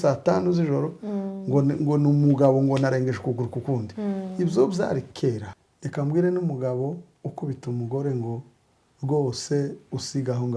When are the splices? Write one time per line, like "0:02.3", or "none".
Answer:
0:05.5